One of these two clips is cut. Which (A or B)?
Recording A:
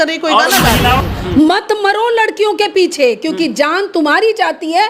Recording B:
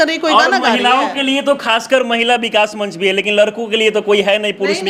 A